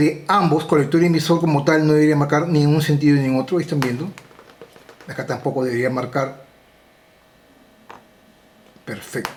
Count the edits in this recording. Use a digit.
0